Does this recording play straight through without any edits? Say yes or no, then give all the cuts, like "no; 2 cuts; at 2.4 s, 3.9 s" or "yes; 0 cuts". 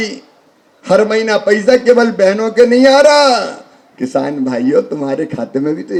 yes; 0 cuts